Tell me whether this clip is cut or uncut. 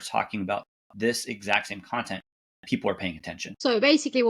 cut